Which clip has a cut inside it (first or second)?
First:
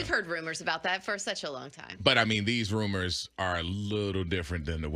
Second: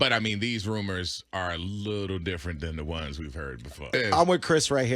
second